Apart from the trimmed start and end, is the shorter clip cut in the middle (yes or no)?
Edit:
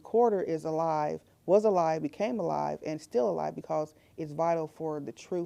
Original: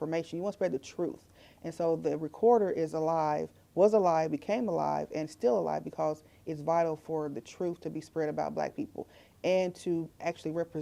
no